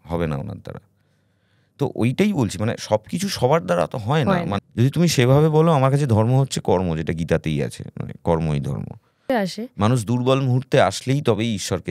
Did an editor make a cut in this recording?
yes; 2 cuts; at 4.6 s, 9.2 s

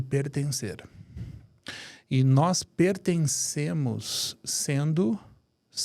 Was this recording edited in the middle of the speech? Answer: no; 0 cuts

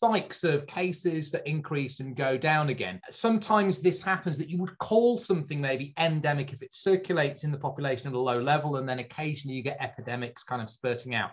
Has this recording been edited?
no; 0 cuts

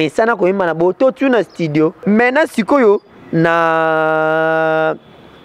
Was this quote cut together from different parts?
yes; 1 cut; at 2.0 s

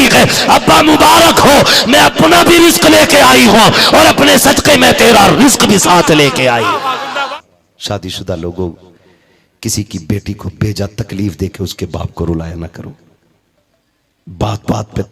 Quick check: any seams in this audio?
yes; 1 cut; at 7.3 s

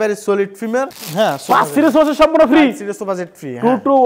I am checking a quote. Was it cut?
no; 0 cuts

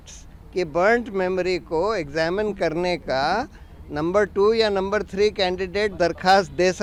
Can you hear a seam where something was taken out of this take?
no; 0 cuts

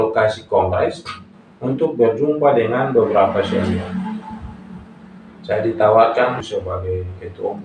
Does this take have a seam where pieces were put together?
yes; 1 cut; at 6.4 s

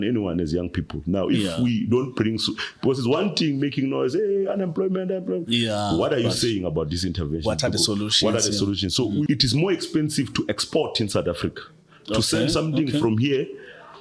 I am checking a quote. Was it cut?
yes; 1 cut; at 9.3 s

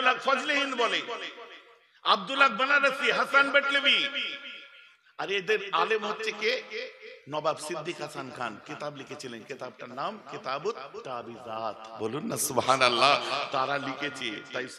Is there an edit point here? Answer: no; 0 cuts

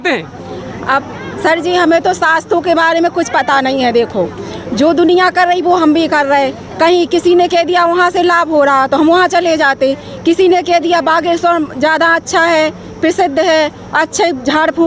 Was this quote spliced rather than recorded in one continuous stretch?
no; 0 cuts

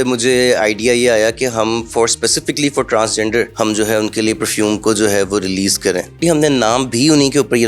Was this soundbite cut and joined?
yes; 2 cuts; at 3.5 s, 6.2 s

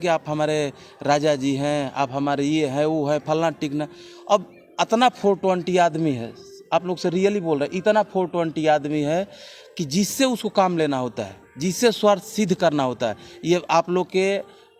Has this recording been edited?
no; 0 cuts

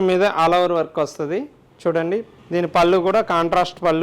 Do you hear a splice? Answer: yes; 2 cuts; at 1.6 s, 2.4 s

